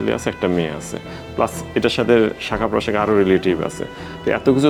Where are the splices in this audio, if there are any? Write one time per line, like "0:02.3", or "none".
none

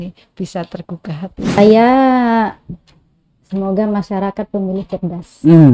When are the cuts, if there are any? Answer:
0:01.6

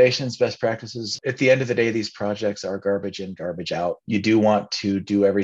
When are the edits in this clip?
0:01.2
0:04.0

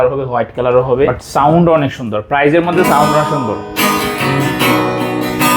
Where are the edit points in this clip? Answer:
0:01.2

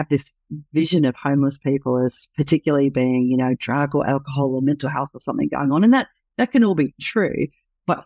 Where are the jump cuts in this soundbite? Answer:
none

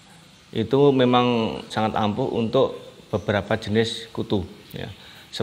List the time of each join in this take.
0:01.7

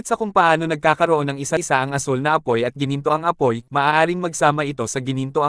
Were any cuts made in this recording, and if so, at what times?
0:01.6

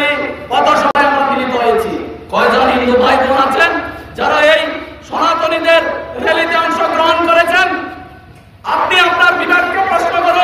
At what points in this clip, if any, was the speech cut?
none

